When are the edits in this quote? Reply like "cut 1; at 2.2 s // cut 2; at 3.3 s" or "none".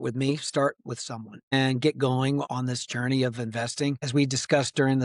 cut 1; at 1.5 s // cut 2; at 2.4 s // cut 3; at 4.0 s